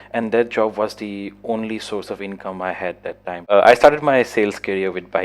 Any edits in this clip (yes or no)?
yes